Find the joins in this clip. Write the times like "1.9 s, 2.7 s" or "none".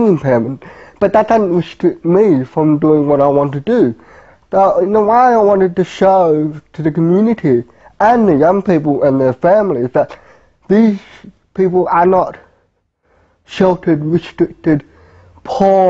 8.3 s